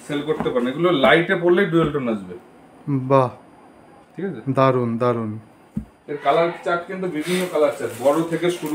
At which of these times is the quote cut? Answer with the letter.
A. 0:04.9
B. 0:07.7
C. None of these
C